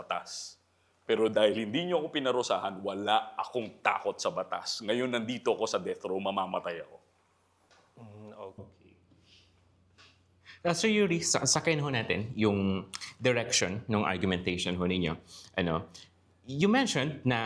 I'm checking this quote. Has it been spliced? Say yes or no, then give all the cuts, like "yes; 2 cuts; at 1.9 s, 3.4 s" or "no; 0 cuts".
no; 0 cuts